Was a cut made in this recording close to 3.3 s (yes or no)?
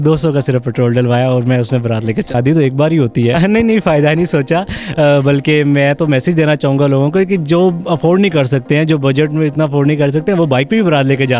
yes